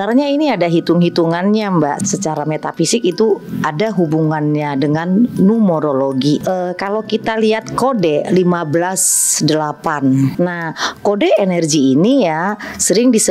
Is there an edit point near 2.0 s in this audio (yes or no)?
yes